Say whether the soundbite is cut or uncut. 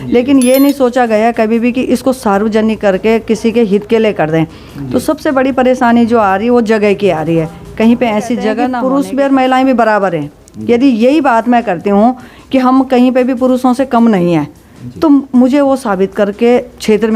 cut